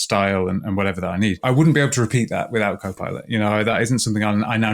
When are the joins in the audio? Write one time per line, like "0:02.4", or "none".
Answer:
0:01.4